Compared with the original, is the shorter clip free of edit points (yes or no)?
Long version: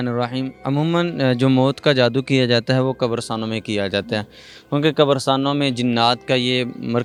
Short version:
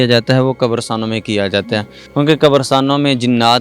no